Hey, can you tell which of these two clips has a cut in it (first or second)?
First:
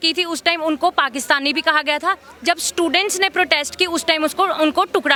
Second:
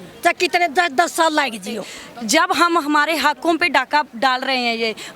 second